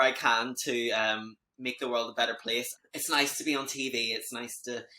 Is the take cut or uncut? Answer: cut